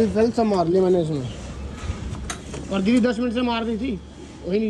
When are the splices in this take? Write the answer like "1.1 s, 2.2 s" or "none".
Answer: none